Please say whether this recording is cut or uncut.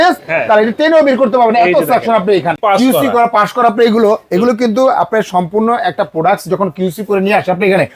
cut